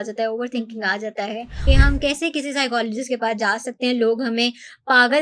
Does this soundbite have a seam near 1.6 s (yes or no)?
yes